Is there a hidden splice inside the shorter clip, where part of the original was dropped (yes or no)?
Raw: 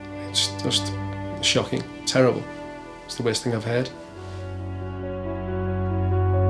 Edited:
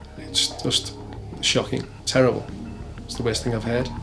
no